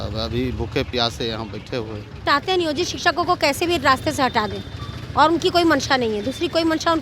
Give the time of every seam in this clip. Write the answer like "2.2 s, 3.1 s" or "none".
2.2 s